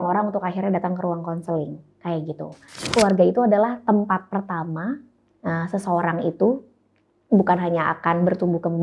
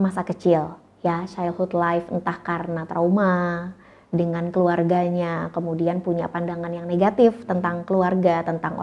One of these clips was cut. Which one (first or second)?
first